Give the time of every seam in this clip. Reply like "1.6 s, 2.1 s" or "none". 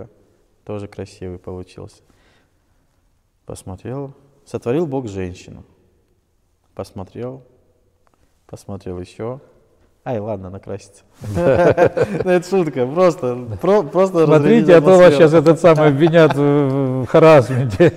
none